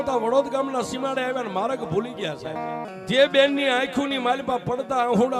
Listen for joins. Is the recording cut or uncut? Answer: cut